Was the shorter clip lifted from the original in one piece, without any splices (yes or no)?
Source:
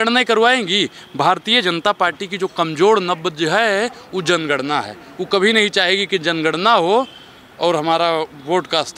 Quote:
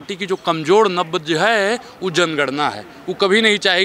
yes